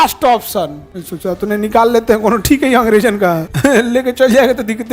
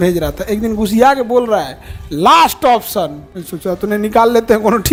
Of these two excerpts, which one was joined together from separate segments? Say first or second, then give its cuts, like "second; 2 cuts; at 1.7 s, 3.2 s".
first; 1 cut; at 3.5 s